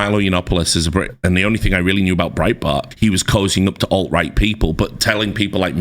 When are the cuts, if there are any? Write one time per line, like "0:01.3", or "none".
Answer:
0:01.1
0:02.9

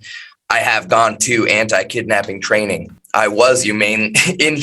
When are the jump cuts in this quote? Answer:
0:03.0

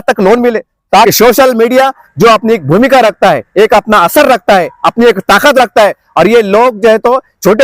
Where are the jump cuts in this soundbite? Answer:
0:01.1

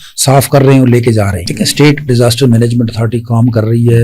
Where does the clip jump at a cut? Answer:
0:01.4

